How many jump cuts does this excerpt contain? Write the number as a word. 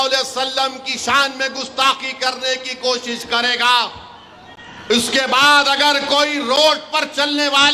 zero